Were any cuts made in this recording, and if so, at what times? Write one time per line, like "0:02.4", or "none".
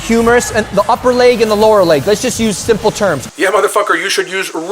0:03.2

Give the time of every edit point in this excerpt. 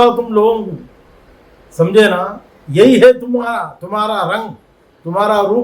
none

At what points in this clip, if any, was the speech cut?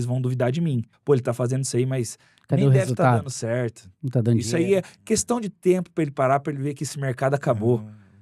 0:00.9

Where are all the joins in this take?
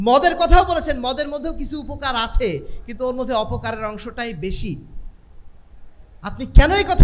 none

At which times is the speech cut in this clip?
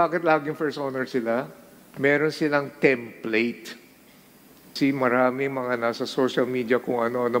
0:04.8

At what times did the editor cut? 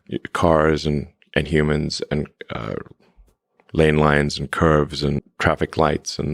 0:05.3

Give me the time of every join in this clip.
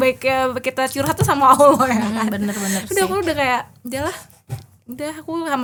none

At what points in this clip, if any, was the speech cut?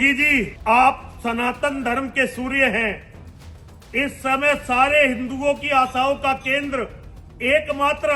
none

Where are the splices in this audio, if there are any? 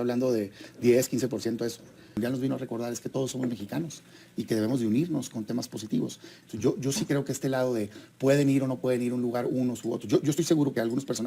0:02.2

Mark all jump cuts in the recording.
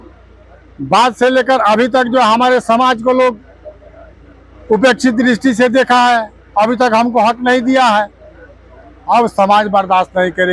none

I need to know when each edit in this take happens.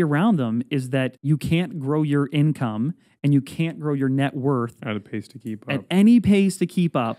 0:01.2

